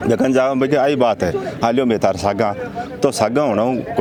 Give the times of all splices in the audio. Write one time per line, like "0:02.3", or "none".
none